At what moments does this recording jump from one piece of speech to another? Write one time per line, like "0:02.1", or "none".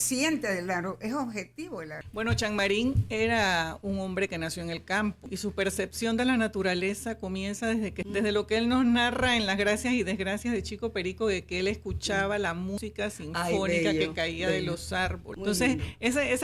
0:02.0
0:05.3
0:08.0
0:12.8
0:15.3